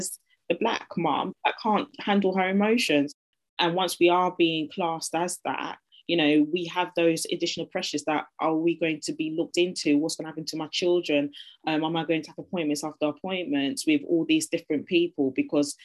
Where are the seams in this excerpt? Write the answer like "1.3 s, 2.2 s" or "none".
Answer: 1.5 s, 3.1 s